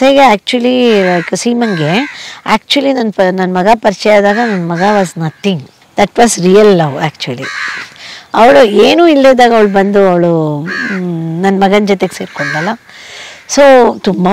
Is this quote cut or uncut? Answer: uncut